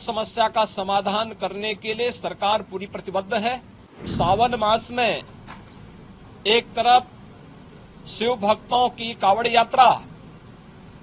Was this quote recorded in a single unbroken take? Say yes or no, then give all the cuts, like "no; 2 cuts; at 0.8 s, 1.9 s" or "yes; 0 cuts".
no; 1 cut; at 4.1 s